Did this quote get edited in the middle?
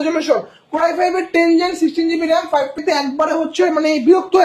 yes; 1 cut; at 2.8 s

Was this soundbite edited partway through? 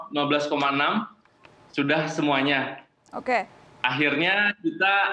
no; 0 cuts

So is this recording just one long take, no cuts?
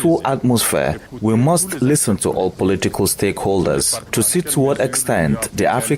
no; 2 cuts; at 1.1 s, 4.0 s

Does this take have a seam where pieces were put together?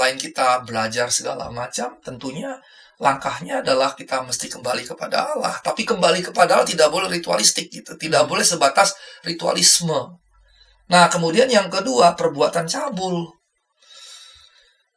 no; 0 cuts

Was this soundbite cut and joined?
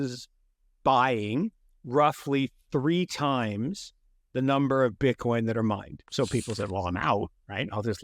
yes; 1 cut; at 6.0 s

